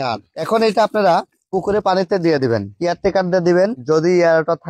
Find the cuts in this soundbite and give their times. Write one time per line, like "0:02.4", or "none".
none